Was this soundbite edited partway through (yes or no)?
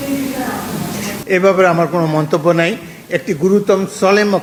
no